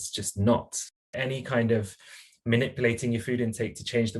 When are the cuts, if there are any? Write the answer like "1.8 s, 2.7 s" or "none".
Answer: 1.1 s